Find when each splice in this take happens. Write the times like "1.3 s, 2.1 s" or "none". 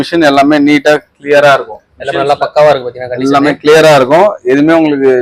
none

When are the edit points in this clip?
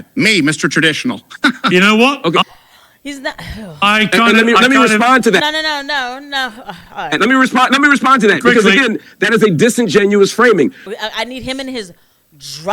10.9 s

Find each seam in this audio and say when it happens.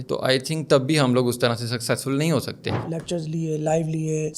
2.7 s

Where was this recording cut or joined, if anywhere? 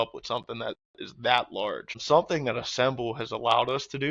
1.9 s

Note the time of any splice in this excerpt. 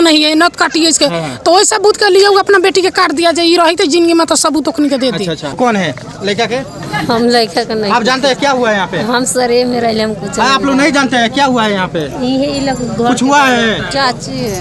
none

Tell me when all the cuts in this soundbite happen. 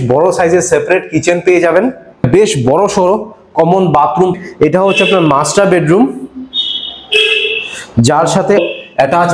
2.3 s, 4.3 s, 8.6 s

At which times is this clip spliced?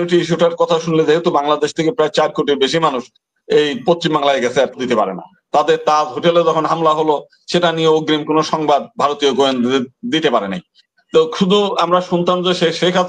4.8 s

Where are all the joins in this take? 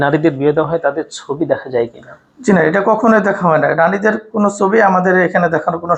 none

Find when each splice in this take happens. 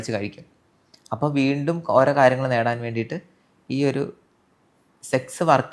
none

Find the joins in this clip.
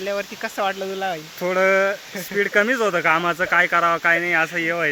none

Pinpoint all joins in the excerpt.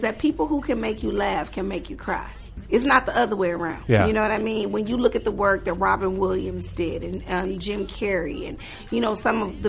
2.6 s, 3.8 s

